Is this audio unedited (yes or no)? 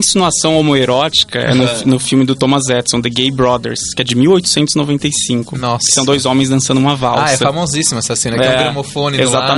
yes